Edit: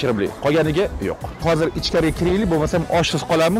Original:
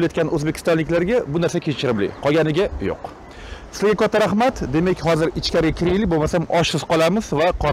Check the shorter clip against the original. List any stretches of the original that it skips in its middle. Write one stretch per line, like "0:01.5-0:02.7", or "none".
0:03.2-0:05.0